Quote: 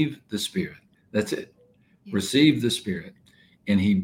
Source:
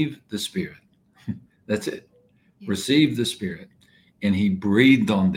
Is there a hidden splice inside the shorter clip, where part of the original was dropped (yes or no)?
yes